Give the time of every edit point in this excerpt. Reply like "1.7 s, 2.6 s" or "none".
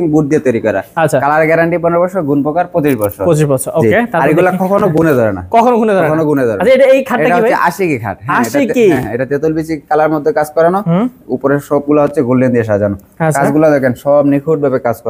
none